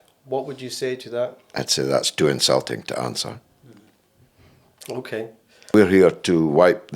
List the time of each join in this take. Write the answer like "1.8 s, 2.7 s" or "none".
5.7 s